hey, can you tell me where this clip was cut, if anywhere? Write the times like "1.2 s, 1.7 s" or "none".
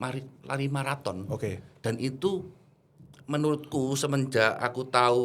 none